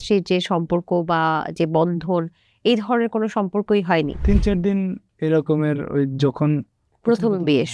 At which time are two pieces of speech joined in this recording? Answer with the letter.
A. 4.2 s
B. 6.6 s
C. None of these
A